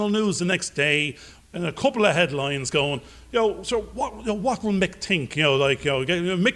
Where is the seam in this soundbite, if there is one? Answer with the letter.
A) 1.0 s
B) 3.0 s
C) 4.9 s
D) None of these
D